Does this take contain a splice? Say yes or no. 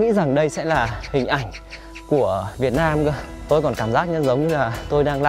yes